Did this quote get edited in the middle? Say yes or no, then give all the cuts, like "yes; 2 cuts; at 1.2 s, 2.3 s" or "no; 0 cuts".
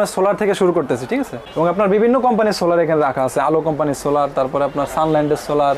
yes; 1 cut; at 1.5 s